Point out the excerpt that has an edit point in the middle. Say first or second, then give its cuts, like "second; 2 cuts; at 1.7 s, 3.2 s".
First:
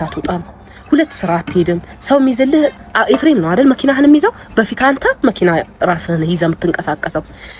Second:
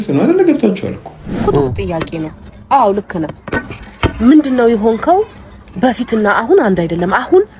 second; 1 cut; at 1.4 s